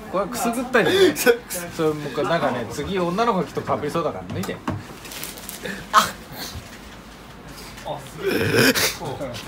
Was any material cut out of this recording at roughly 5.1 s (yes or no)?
yes